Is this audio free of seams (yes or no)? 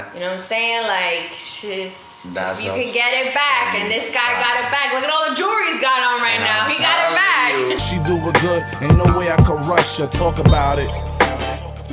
no